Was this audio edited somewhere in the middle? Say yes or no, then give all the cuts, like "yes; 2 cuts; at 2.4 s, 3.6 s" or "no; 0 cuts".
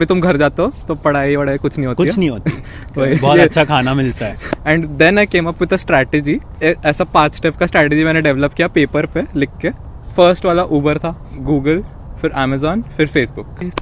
yes; 4 cuts; at 4.4 s, 6.5 s, 10.0 s, 11.3 s